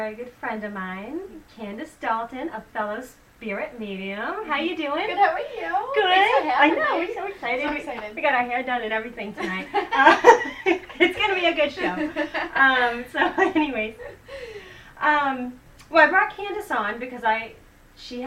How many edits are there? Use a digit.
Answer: 0